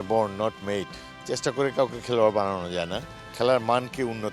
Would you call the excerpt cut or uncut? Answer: uncut